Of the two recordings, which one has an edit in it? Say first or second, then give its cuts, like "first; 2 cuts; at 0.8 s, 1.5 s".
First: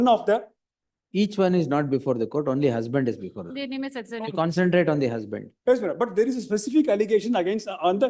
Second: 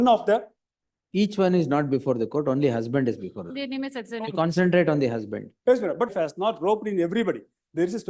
second; 1 cut; at 6.1 s